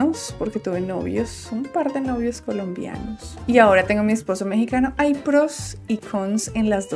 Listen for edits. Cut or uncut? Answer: uncut